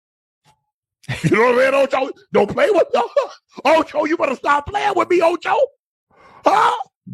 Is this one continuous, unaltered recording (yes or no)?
yes